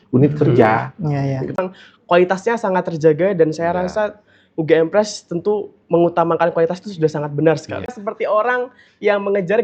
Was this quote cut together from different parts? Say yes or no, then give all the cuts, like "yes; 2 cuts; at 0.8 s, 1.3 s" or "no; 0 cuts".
yes; 2 cuts; at 1.6 s, 8.0 s